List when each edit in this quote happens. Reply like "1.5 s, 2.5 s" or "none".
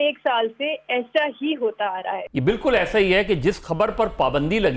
2.2 s